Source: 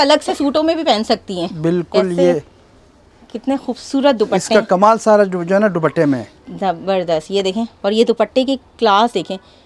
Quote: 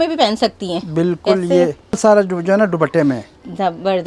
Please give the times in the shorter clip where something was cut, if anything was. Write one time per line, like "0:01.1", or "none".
0:02.0